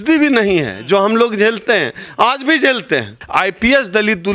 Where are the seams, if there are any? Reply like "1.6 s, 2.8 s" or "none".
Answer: 3.2 s